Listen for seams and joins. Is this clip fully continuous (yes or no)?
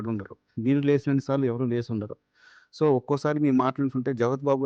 yes